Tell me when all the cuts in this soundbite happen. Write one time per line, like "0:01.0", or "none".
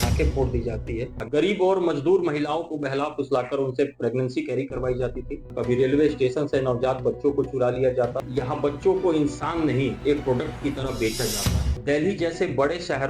0:01.1
0:05.5
0:08.2
0:11.7